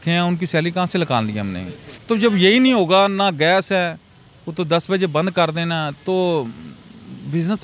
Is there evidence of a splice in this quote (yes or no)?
yes